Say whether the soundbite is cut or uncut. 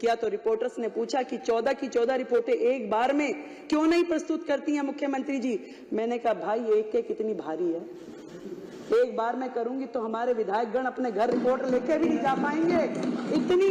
uncut